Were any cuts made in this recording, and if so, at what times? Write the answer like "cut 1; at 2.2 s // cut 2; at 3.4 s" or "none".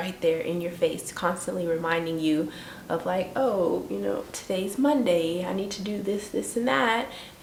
none